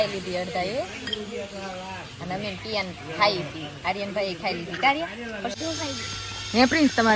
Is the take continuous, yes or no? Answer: no